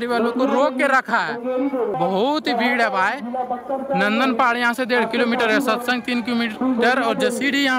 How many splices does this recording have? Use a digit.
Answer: 0